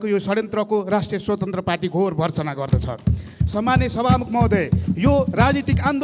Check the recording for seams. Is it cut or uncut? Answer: uncut